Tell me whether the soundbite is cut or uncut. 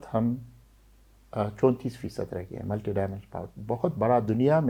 uncut